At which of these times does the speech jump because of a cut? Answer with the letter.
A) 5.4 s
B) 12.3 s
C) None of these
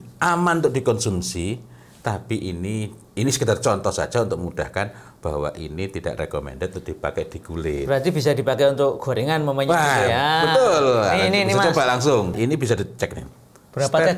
B